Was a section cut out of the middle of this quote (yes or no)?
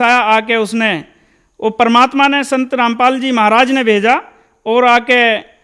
no